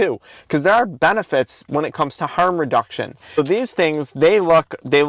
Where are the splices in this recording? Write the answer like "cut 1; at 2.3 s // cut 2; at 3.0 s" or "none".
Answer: cut 1; at 3.4 s